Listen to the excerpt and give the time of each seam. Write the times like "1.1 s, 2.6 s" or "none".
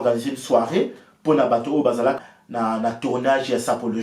2.2 s

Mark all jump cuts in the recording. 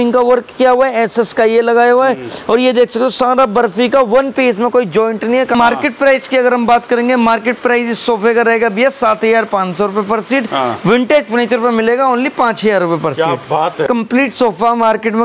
5.5 s, 13.9 s

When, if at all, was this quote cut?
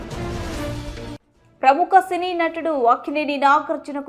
1.1 s

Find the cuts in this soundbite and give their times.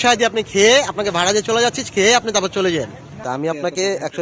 3.2 s

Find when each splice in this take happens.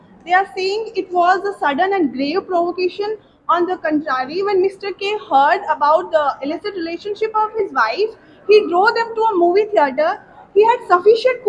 none

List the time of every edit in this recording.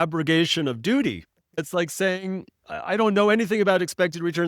1.6 s

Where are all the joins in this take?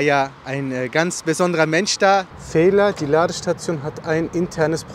2.3 s

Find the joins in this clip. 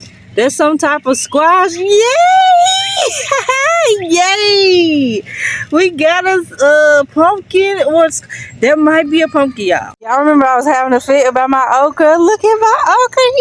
9.9 s

